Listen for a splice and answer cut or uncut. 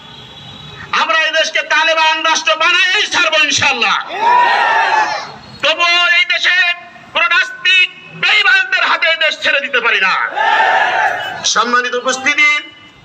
uncut